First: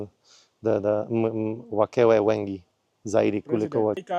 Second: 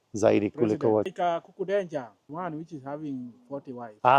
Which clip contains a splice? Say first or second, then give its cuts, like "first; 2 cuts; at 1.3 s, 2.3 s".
second; 1 cut; at 2.2 s